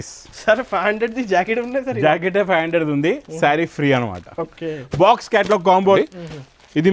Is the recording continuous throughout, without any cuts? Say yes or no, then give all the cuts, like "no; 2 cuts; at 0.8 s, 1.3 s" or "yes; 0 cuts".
no; 1 cut; at 6.0 s